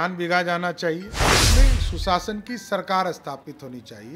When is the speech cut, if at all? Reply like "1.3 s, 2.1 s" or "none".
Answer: 1.5 s